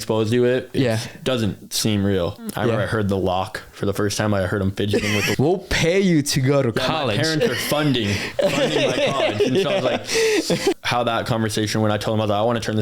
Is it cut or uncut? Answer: cut